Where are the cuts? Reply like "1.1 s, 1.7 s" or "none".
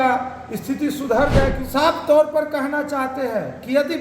1.6 s